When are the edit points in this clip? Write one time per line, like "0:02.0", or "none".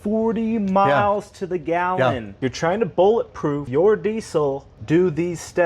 0:02.4